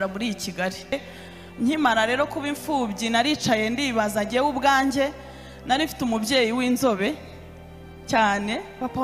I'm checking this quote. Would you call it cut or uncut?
cut